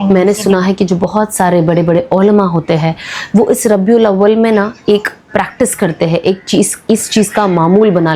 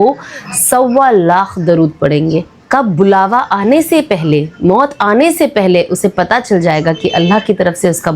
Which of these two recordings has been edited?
second; 1 cut; at 2.6 s

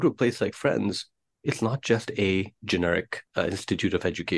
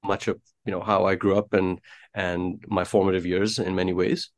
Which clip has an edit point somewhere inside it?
first; 1 cut; at 3.2 s

